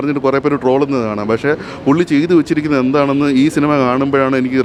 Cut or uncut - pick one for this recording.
uncut